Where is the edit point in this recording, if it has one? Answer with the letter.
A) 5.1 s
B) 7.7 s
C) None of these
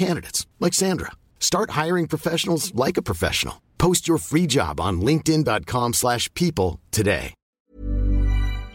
B